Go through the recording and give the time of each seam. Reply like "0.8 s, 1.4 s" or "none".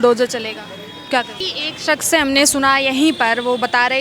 1.5 s